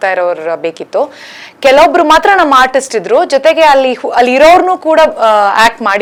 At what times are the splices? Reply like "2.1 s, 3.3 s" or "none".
none

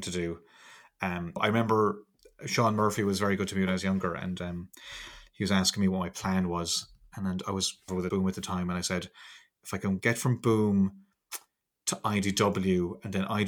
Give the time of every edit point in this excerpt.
1.4 s, 8.0 s

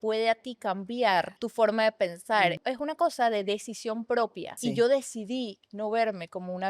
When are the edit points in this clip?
1.4 s, 2.6 s, 4.6 s

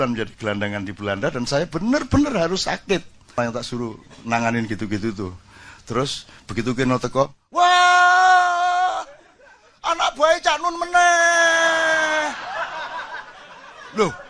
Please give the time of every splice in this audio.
3.4 s

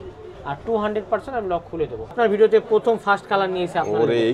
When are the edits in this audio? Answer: 2.1 s

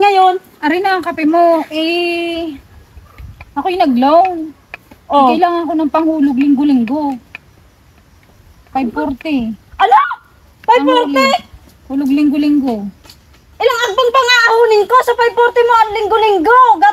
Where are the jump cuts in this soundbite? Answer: none

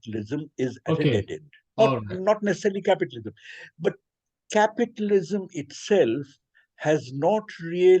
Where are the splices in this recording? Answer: none

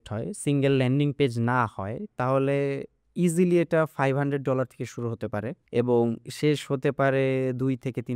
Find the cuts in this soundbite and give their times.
5.6 s

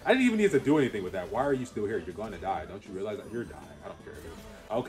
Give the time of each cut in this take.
none

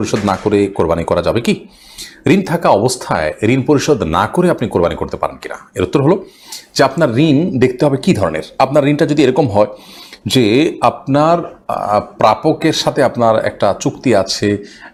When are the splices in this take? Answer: none

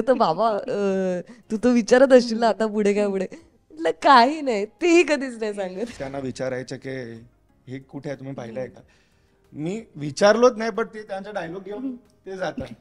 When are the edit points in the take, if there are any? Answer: 6.1 s

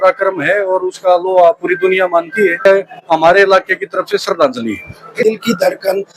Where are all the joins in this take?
2.7 s, 5.2 s

